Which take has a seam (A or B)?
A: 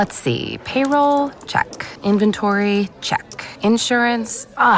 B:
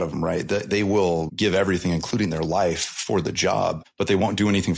B